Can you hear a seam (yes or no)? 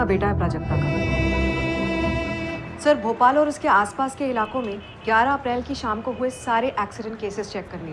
yes